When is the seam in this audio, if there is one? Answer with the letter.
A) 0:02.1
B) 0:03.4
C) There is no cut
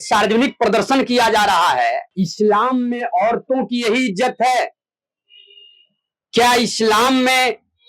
A